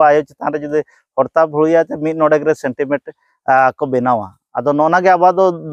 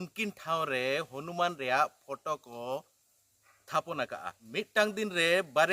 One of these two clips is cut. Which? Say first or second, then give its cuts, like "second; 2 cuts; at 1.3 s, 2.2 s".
second; 1 cut; at 4.5 s